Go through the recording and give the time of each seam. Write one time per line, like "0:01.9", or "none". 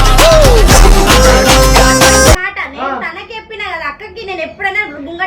0:02.4